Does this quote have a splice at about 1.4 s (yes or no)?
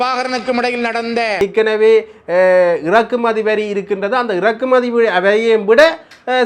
yes